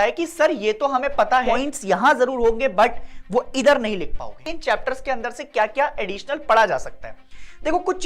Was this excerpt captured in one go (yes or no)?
no